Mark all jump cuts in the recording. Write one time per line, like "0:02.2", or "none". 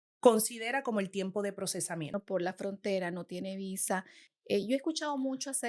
0:02.1